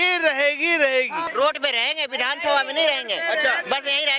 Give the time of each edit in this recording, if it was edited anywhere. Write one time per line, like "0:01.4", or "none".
0:01.2